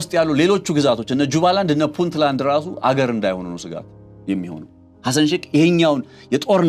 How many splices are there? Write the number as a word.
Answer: zero